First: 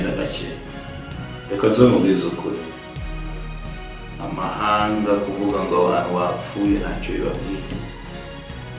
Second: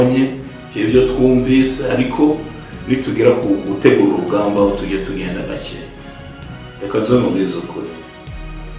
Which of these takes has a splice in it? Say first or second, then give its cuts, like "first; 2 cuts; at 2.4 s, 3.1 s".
first; 1 cut; at 7.9 s